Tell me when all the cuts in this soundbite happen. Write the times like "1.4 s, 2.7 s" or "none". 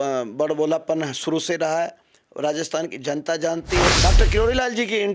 3.9 s